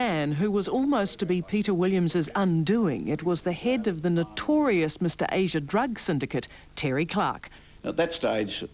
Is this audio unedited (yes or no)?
no